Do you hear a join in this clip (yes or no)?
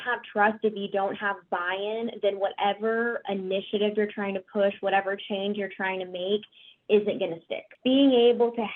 yes